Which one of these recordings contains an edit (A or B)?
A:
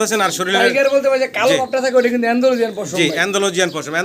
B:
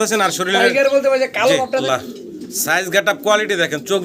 B